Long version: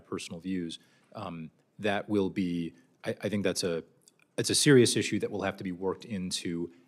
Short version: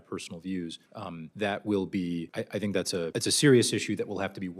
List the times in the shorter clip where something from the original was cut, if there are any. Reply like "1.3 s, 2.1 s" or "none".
1.1 s, 2.3 s, 3.1 s